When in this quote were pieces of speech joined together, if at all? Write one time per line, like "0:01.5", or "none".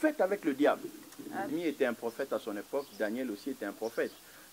0:01.5